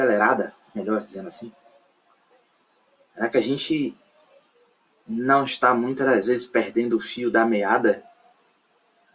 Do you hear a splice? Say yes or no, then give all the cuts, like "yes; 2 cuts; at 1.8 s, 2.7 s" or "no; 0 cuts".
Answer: no; 0 cuts